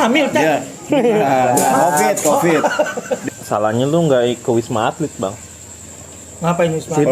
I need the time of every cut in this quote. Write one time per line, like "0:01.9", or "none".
0:03.2